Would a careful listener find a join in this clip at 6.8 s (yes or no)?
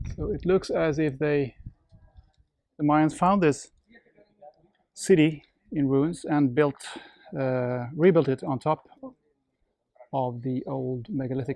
no